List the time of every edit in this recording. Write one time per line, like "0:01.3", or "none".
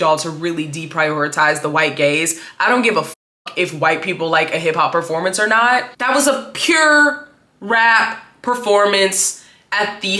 0:05.9